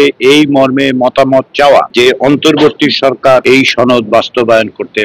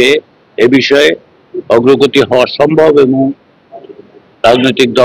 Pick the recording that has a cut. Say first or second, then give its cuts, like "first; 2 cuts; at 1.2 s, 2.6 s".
first; 2 cuts; at 1.9 s, 3.4 s